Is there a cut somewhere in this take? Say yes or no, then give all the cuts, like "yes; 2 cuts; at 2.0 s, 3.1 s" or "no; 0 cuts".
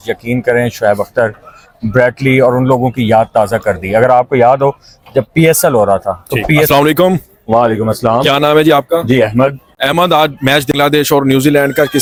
no; 0 cuts